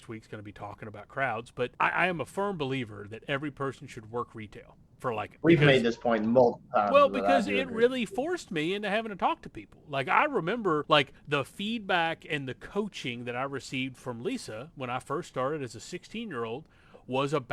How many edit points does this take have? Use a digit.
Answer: 3